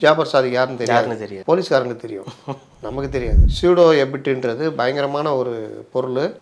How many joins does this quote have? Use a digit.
1